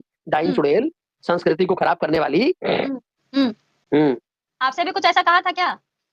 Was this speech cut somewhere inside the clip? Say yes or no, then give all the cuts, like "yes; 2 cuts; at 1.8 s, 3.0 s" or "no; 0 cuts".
no; 0 cuts